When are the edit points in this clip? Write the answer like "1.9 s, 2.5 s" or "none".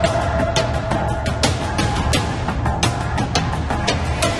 2.3 s